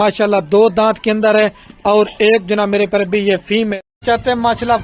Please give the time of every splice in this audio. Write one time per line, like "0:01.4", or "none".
0:03.8